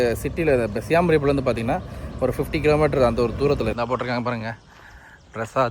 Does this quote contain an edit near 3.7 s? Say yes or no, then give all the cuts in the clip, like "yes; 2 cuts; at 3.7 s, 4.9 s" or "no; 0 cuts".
yes; 1 cut; at 3.7 s